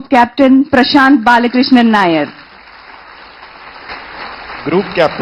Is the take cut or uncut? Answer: cut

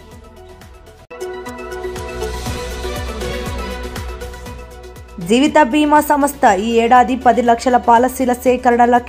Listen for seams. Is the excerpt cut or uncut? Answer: cut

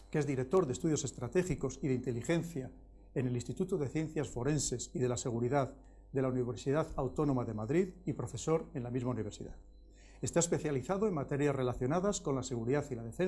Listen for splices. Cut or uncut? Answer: uncut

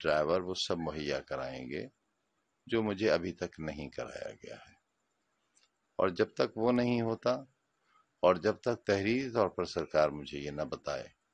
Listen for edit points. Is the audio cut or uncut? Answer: uncut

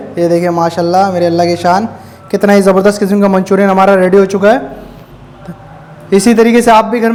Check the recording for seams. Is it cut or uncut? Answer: uncut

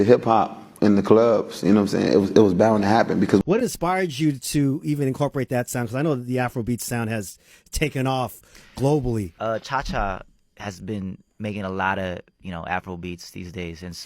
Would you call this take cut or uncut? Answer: cut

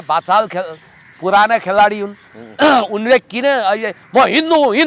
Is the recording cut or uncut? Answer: uncut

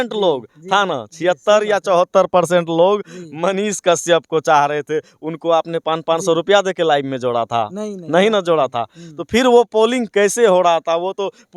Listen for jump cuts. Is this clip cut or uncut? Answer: uncut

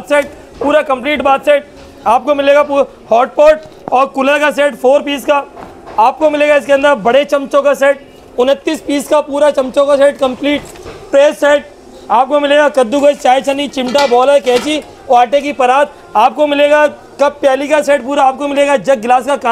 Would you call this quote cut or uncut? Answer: uncut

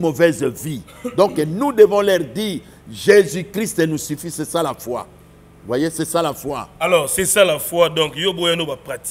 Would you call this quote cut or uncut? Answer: uncut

